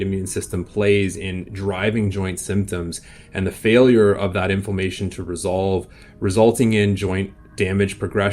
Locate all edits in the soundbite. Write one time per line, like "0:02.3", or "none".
none